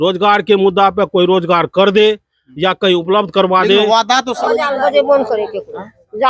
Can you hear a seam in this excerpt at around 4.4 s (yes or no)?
yes